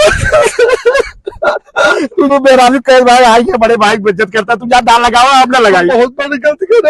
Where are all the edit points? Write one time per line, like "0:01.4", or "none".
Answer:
0:02.3

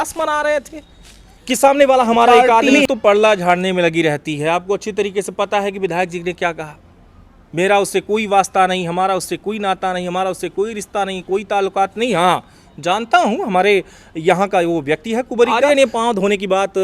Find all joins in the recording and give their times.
0:02.9
0:15.6

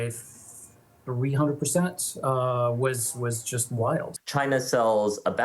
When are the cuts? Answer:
0:04.1

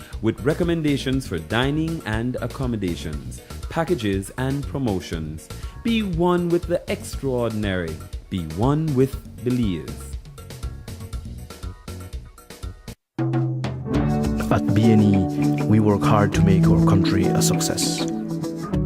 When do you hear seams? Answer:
0:12.9

